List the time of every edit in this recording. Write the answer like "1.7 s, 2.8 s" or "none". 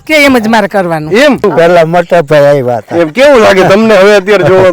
1.4 s